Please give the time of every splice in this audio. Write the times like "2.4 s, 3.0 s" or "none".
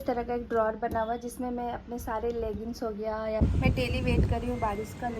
3.4 s